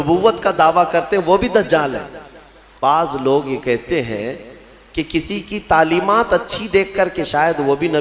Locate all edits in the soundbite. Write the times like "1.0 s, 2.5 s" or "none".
2.7 s